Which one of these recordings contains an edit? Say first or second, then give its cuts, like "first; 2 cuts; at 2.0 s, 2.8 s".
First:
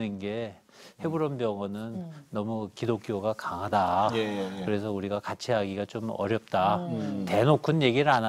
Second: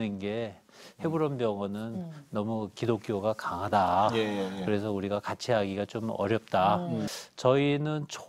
second; 1 cut; at 7.1 s